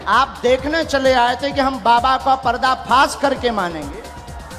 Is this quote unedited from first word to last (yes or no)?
yes